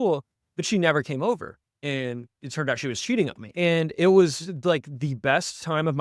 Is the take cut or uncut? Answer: cut